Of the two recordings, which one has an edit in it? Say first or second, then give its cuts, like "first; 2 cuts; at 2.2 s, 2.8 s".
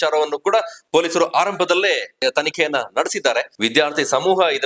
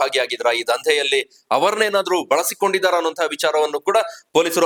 first; 2 cuts; at 2.2 s, 3.5 s